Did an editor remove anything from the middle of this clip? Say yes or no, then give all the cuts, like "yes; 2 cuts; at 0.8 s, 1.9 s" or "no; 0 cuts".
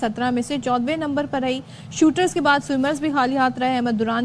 no; 0 cuts